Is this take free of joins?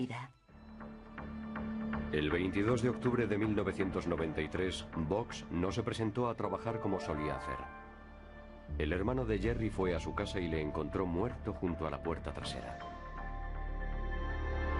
yes; 0 cuts

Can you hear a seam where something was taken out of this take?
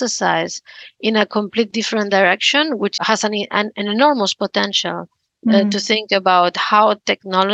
no; 0 cuts

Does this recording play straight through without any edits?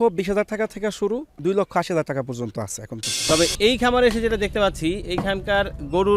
no; 2 cuts; at 1.3 s, 3.1 s

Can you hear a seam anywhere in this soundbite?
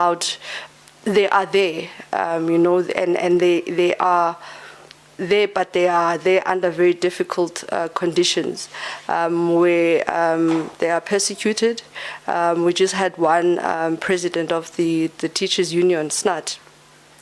no; 0 cuts

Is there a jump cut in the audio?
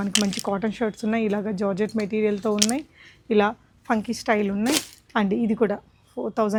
no; 0 cuts

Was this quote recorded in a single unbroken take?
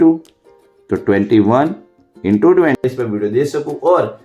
no; 1 cut; at 2.8 s

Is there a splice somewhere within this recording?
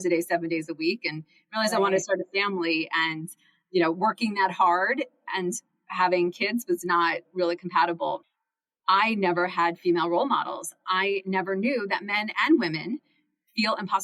yes; 1 cut; at 8.3 s

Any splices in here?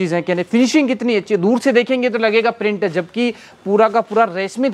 no; 0 cuts

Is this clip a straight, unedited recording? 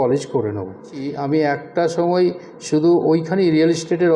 no; 1 cut; at 1.1 s

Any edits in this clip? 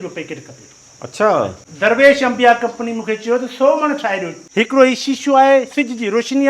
yes; 2 cuts; at 1.6 s, 4.4 s

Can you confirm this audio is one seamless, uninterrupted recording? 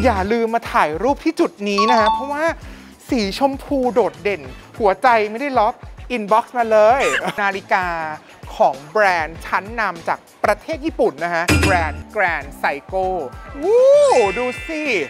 no; 3 cuts; at 4.5 s, 7.4 s, 13.4 s

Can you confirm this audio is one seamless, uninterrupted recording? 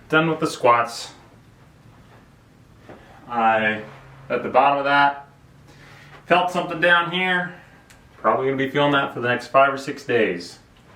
yes; 0 cuts

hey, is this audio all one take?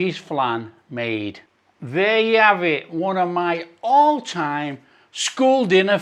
no; 1 cut; at 1.5 s

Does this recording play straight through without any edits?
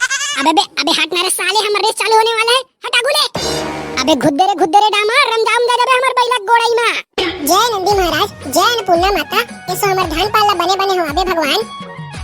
no; 1 cut; at 7.0 s

